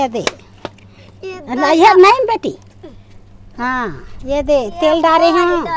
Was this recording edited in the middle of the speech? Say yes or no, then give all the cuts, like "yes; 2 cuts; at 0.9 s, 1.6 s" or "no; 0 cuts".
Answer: no; 0 cuts